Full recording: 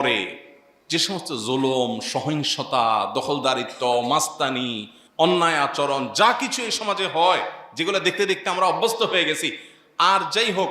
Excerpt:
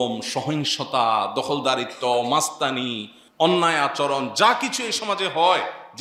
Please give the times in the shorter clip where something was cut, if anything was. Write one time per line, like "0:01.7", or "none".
none